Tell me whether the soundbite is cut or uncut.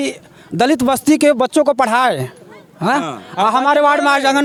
uncut